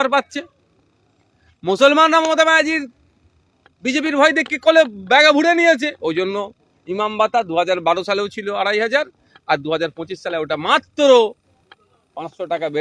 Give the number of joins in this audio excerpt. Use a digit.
0